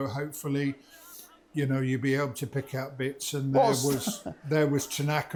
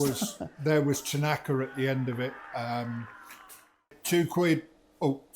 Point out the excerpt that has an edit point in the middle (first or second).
second